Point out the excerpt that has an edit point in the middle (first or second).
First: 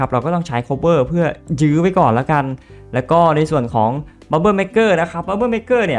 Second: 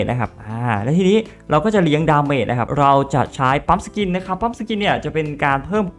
second